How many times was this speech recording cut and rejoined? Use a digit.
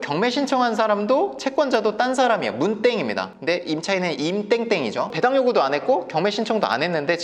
0